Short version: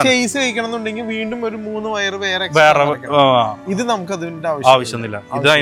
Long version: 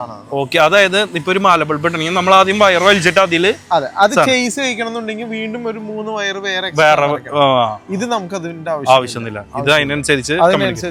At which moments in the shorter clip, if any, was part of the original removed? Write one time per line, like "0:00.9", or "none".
none